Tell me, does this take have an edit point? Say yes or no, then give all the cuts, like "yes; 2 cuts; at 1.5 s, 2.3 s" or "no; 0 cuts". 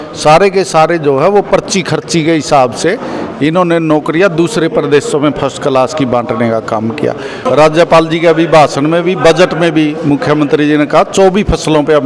yes; 1 cut; at 7.4 s